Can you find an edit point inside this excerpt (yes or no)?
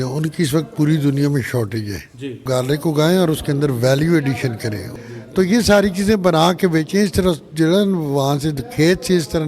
yes